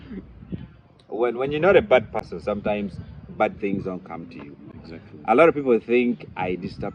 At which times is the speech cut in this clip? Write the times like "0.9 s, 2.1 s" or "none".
none